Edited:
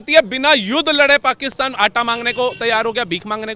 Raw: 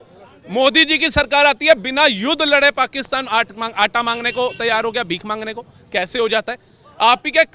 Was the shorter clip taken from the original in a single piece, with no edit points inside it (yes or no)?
no